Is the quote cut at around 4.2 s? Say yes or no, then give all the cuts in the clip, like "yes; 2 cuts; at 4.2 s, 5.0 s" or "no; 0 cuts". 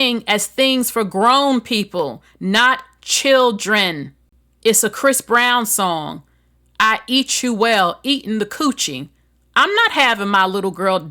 yes; 1 cut; at 4.2 s